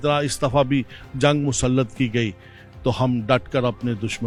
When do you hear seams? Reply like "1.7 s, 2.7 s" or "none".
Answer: none